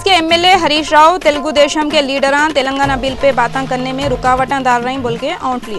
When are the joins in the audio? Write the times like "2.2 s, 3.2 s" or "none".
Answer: none